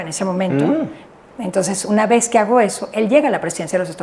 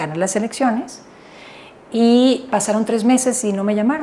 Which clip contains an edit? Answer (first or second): first